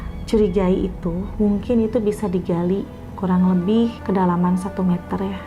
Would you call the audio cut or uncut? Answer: uncut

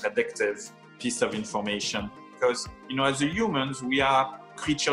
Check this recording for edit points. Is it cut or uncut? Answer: cut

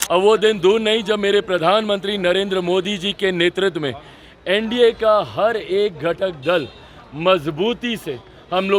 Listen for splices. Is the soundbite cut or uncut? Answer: uncut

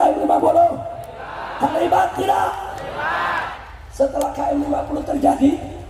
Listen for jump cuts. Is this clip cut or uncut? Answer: uncut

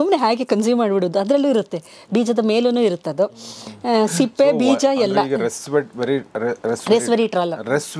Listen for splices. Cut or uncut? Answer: uncut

